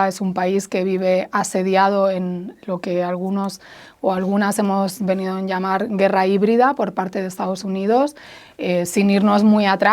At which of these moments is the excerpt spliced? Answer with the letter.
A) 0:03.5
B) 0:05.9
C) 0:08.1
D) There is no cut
D